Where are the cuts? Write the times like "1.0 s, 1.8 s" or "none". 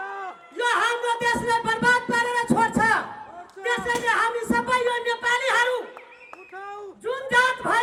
none